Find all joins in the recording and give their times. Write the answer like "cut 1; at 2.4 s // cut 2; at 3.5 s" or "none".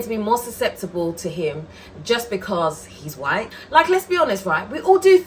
cut 1; at 3.6 s

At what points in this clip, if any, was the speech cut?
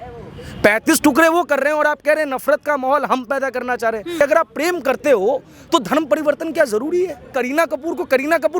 cut 1; at 4.1 s // cut 2; at 7.2 s

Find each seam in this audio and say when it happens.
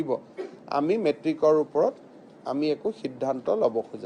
none

